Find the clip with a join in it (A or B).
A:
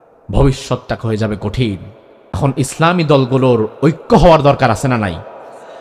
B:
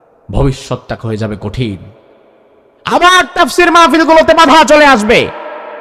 A